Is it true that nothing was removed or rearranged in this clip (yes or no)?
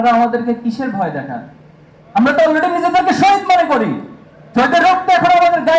yes